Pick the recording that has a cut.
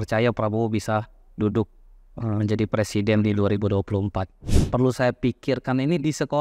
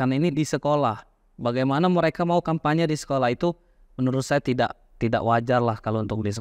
first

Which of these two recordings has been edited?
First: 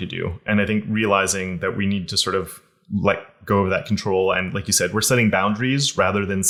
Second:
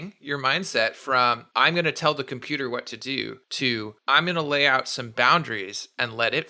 second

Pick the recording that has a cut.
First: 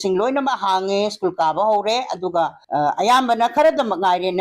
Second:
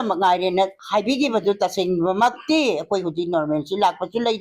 first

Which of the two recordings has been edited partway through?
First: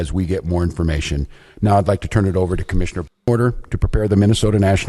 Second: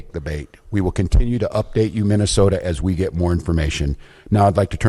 first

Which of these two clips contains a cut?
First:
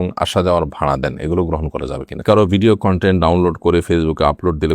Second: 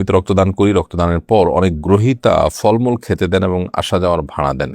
first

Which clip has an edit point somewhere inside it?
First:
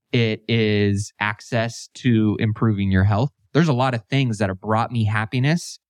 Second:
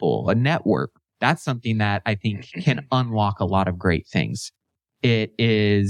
second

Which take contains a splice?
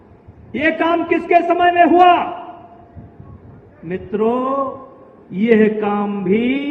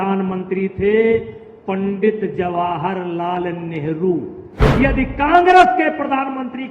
second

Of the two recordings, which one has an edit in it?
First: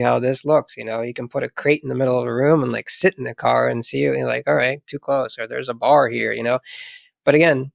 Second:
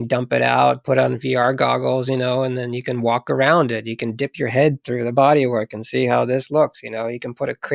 first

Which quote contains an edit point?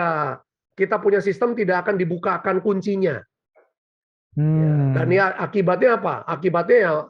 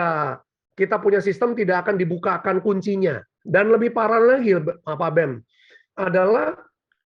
second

